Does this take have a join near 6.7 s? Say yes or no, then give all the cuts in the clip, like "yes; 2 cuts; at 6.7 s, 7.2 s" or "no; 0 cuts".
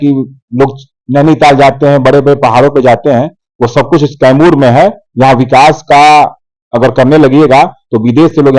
no; 0 cuts